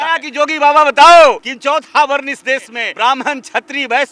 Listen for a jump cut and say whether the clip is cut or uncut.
cut